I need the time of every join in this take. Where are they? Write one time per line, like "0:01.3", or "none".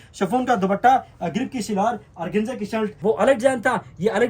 0:02.9